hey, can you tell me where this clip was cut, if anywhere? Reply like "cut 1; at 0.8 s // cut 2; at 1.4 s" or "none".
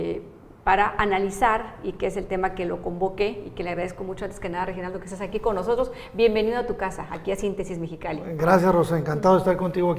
cut 1; at 5.7 s